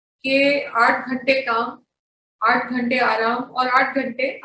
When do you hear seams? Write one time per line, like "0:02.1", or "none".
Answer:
none